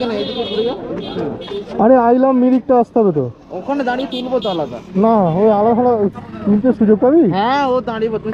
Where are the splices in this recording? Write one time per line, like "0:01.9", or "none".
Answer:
none